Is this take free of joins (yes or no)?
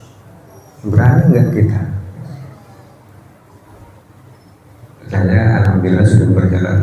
yes